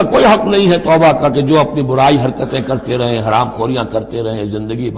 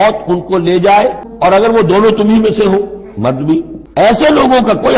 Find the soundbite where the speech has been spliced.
second; 2 cuts; at 1.3 s, 3.8 s

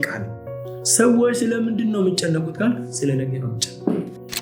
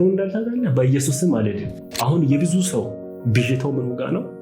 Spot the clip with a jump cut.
second; 1 cut; at 1.9 s

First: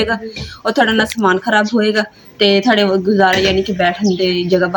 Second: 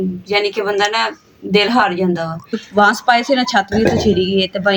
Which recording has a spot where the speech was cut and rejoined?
second; 1 cut; at 2.6 s

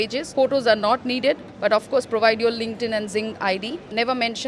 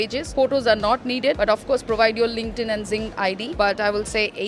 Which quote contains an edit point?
second; 2 cuts; at 1.4 s, 3.5 s

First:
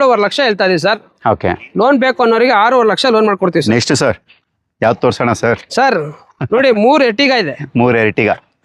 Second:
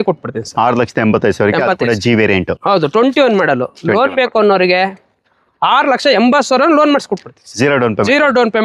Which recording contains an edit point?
first; 1 cut; at 3.6 s

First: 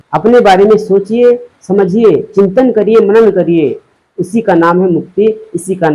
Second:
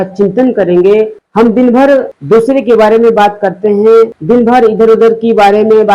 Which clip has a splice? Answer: second; 3 cuts; at 1.2 s, 2.1 s, 4.2 s

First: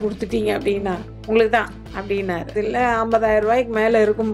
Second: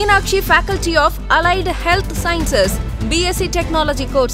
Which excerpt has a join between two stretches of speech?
first; 2 cuts; at 1.1 s, 2.5 s

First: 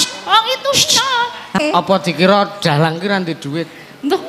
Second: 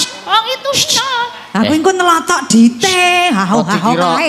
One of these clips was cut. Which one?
first; 1 cut; at 1.6 s

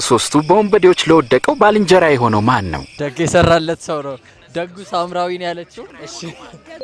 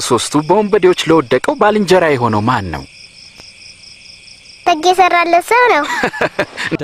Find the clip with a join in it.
first; 2 cuts; at 3.1 s, 5.9 s

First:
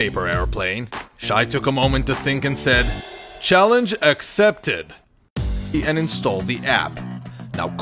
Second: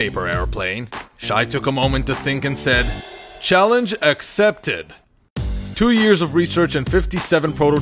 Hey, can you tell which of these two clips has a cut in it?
second; 1 cut; at 5.7 s

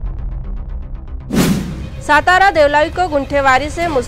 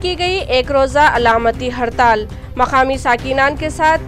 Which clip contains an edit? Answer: first; 1 cut; at 1.8 s

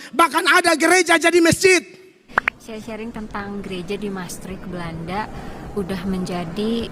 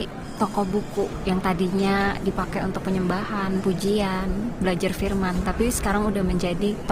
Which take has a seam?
first; 1 cut; at 2.3 s

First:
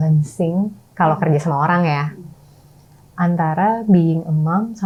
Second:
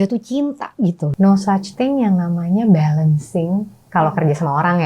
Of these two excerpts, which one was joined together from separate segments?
second; 1 cut; at 1.1 s

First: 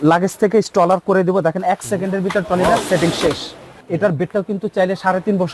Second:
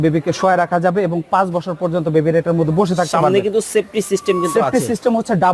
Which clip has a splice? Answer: first; 1 cut; at 3.7 s

